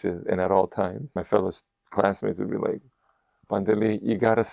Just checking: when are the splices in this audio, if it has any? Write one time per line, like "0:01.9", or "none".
0:01.2